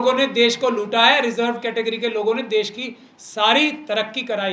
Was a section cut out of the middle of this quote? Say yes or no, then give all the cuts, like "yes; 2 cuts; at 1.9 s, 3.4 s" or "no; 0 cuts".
no; 0 cuts